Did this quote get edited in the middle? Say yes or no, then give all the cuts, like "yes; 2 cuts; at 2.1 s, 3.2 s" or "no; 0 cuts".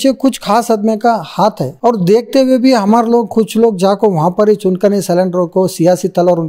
no; 0 cuts